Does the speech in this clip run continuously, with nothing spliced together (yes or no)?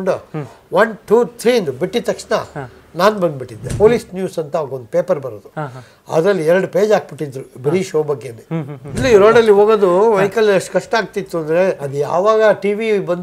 no